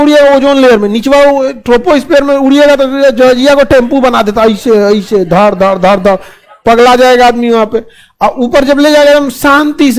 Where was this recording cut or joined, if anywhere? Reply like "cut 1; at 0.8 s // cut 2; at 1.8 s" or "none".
none